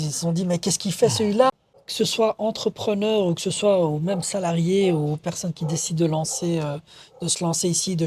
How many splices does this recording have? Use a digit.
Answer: 1